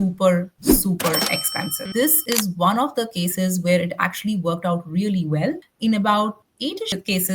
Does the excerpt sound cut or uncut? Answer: cut